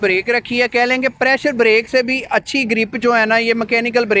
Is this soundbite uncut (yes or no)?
yes